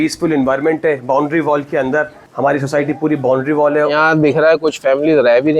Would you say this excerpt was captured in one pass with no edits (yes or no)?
no